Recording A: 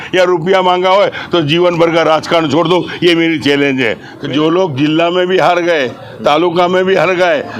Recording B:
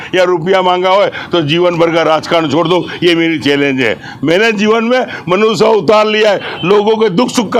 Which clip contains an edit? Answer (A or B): A